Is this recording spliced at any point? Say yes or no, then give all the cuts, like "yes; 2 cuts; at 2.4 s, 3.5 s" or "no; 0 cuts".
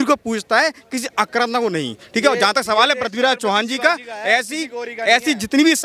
no; 0 cuts